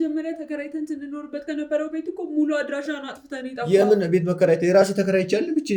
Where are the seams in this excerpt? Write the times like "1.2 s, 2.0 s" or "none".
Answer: none